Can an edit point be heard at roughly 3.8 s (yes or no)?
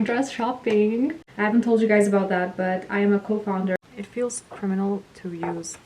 yes